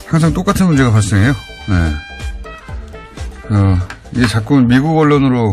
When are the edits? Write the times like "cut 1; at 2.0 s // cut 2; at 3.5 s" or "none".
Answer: cut 1; at 1.5 s